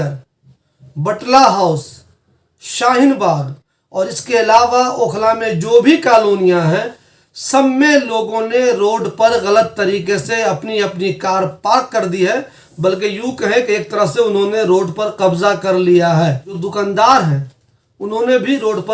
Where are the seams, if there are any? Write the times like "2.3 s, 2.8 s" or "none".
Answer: 16.6 s